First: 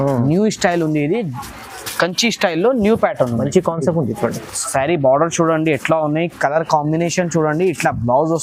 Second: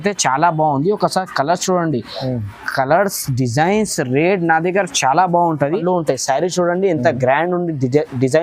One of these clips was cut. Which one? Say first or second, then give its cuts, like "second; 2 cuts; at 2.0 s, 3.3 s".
second; 1 cut; at 5.8 s